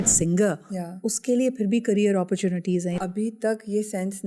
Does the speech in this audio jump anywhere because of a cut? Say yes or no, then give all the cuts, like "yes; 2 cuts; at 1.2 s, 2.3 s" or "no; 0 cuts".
yes; 1 cut; at 3.0 s